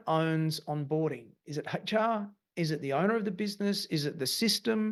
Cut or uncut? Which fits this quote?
uncut